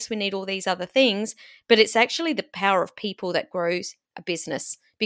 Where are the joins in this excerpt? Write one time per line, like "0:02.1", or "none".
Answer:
none